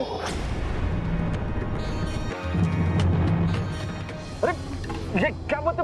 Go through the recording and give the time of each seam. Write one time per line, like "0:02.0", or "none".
0:01.9